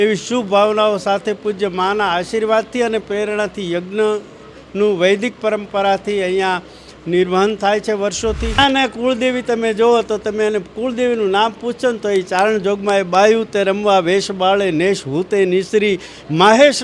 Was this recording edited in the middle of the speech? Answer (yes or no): yes